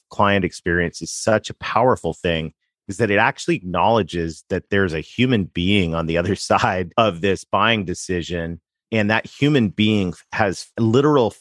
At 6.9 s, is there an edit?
yes; 1 cut; at 6.9 s

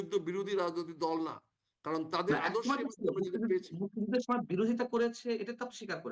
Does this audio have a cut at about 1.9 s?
no; 0 cuts

